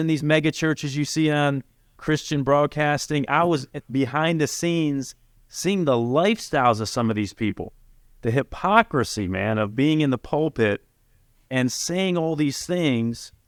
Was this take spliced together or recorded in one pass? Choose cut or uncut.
uncut